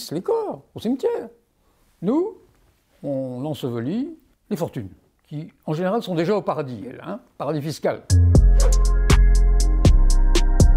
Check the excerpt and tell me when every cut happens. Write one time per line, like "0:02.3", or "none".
0:08.0